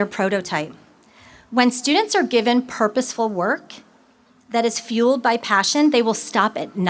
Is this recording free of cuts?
yes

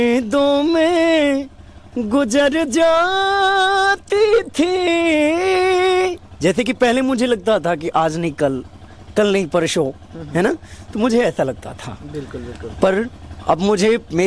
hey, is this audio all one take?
yes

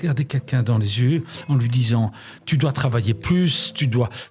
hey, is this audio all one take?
yes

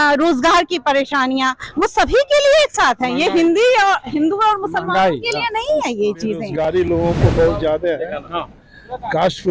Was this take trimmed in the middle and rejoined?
yes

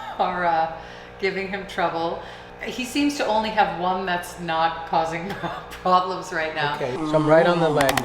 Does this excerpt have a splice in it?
yes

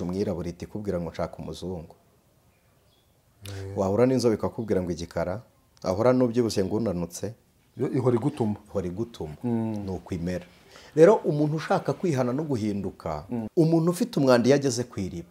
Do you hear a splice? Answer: yes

